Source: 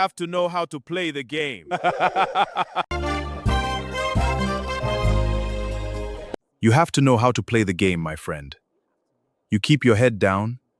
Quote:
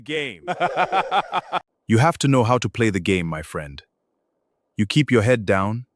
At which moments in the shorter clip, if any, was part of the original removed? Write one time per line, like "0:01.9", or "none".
0:01.7